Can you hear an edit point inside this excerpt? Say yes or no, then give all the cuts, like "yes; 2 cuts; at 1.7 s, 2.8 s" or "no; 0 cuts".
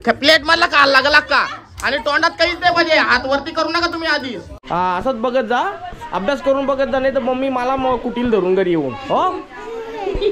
yes; 1 cut; at 4.5 s